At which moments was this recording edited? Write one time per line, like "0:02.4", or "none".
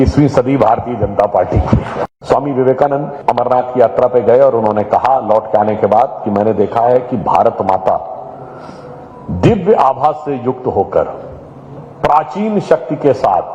0:02.0
0:03.1